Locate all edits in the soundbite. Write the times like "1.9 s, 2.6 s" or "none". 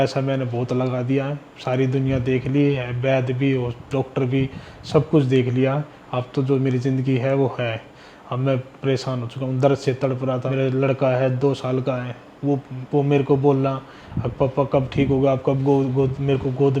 10.5 s